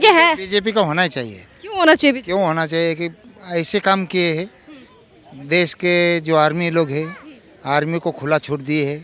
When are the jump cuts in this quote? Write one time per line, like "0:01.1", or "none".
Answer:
none